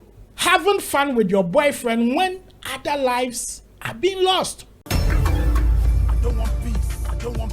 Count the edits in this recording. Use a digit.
1